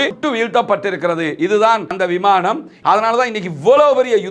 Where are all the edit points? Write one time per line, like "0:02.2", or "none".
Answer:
0:02.7